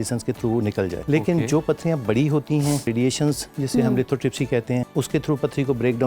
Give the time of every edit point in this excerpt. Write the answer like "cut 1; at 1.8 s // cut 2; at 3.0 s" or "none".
cut 1; at 1.0 s // cut 2; at 2.9 s // cut 3; at 4.9 s